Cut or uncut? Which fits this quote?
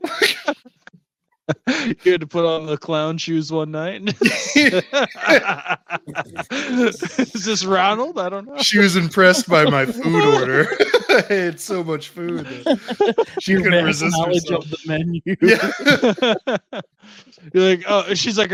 uncut